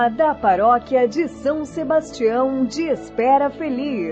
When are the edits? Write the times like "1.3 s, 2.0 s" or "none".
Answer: none